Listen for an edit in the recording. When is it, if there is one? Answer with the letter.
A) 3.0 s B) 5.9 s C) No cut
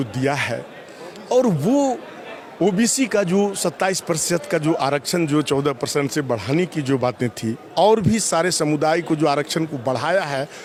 C